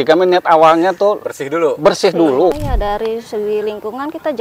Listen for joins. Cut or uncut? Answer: cut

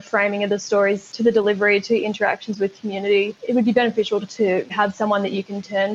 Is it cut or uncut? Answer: cut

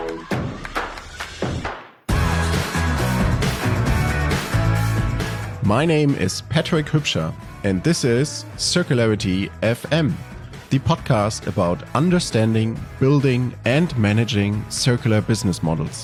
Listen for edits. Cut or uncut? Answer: uncut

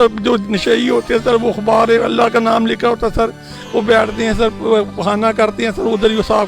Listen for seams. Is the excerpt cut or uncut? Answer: uncut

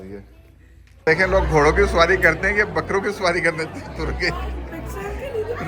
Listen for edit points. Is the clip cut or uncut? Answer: cut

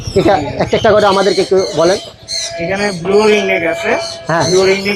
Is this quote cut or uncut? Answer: uncut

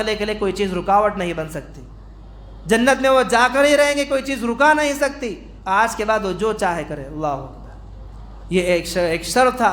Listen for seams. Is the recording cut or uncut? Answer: uncut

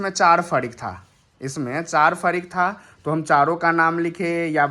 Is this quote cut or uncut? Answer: uncut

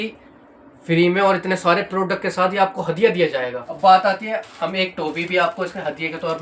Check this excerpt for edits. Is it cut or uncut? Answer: cut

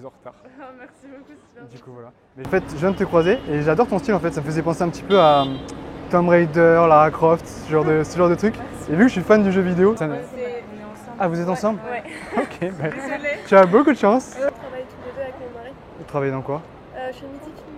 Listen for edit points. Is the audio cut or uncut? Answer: cut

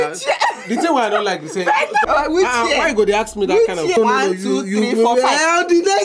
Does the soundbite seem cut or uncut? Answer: cut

